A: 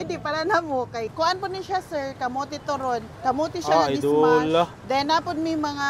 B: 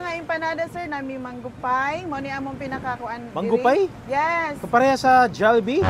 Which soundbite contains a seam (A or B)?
A